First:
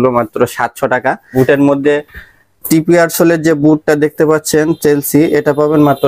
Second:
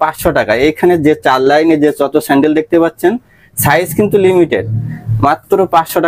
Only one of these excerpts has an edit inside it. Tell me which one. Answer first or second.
first